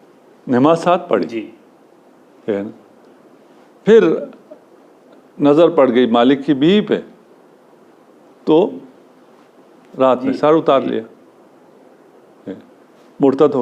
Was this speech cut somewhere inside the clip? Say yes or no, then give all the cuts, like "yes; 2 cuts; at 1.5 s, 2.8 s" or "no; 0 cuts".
no; 0 cuts